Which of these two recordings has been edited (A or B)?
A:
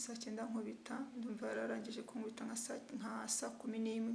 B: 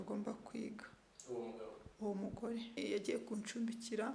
B